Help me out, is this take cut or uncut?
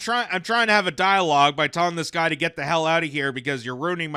uncut